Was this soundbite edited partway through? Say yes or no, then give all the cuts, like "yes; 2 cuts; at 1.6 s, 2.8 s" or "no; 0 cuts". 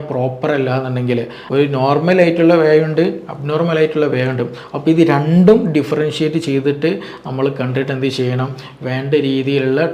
yes; 1 cut; at 1.4 s